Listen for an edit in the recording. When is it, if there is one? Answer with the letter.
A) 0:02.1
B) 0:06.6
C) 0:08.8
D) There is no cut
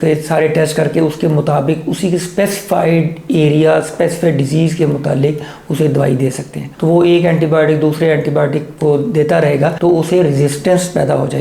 B